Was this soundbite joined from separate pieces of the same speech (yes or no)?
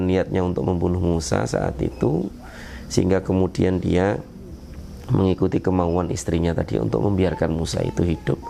no